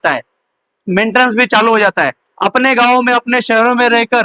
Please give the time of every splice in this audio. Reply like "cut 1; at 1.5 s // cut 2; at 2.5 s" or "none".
none